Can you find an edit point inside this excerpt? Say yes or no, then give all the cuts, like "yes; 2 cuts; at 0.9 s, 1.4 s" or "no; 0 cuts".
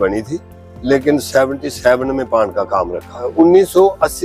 yes; 1 cut; at 3.3 s